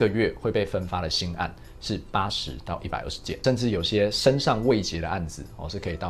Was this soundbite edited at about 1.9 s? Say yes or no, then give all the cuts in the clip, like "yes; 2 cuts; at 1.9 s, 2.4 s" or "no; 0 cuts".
no; 1 cut; at 3.3 s